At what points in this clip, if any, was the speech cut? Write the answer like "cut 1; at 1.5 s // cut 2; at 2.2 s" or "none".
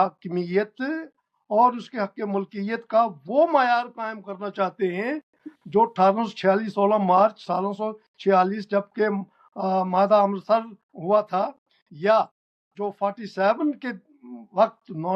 none